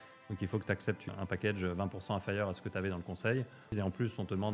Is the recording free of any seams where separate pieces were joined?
no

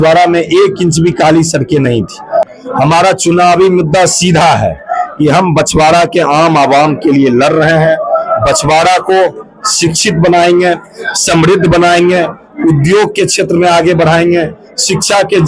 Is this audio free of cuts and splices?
no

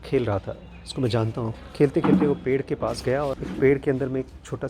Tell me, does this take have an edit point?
yes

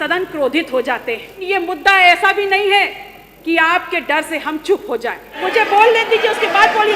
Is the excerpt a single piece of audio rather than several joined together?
no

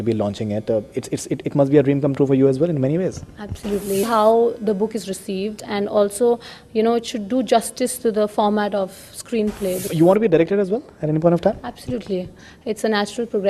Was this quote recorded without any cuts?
no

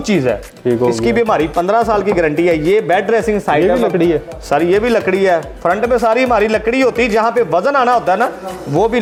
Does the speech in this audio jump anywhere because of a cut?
no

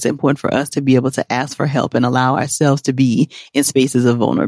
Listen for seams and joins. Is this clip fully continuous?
yes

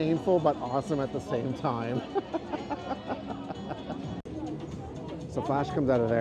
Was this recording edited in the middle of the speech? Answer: no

